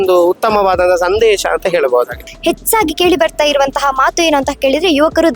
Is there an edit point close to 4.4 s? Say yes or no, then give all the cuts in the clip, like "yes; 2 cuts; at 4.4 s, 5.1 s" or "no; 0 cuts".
no; 1 cut; at 2.2 s